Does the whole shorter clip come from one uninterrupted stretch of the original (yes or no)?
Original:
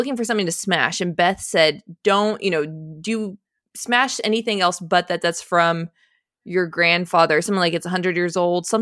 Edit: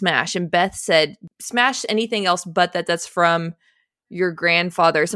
no